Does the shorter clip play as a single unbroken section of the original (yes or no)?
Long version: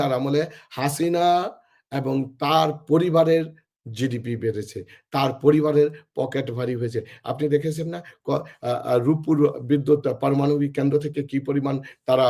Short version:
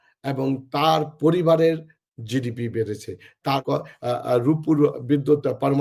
no